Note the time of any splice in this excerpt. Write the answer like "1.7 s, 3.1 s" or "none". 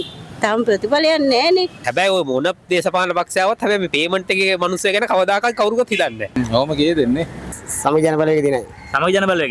1.8 s, 6.4 s, 7.5 s